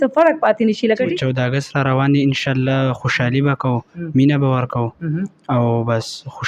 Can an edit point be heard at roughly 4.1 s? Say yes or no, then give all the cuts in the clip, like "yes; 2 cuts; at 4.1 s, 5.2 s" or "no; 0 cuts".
no; 1 cut; at 1.2 s